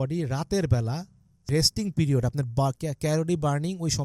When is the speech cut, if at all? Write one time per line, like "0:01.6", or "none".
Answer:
0:01.5